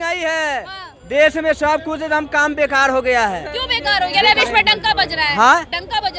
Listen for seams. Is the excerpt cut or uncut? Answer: uncut